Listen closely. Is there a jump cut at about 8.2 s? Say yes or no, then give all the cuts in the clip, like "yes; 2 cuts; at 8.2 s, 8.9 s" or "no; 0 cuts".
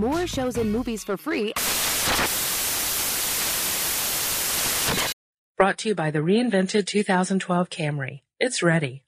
no; 1 cut; at 5.1 s